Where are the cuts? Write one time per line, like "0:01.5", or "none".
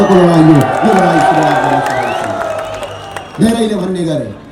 none

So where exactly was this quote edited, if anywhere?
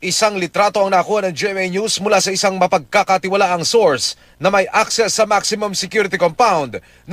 0:04.7

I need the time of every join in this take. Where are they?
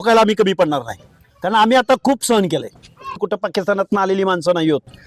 0:03.2

